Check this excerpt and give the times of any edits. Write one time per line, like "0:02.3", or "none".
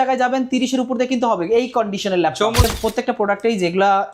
0:02.6

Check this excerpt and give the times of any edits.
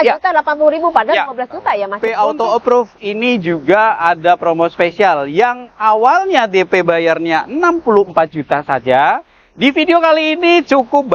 0:02.0

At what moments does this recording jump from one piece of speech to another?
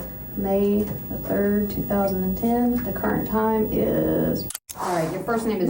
0:04.5

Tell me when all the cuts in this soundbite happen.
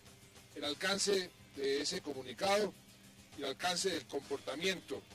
0:03.8

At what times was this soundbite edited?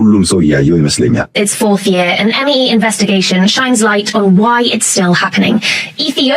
0:01.3

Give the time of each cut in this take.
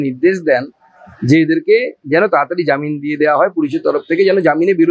none

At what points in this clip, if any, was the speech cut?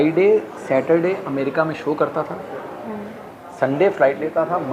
none

